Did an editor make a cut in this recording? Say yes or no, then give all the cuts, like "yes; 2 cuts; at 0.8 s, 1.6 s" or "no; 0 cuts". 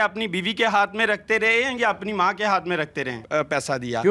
yes; 1 cut; at 3.2 s